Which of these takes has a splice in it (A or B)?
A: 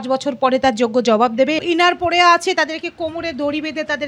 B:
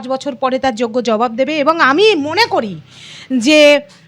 A